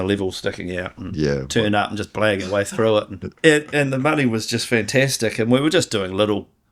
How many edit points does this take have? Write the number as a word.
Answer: one